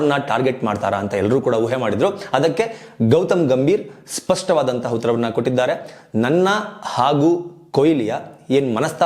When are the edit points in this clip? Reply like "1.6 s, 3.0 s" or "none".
none